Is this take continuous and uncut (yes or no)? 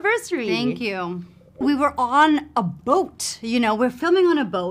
no